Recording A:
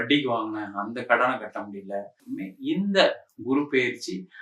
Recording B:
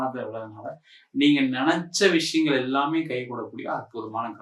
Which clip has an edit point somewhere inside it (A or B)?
A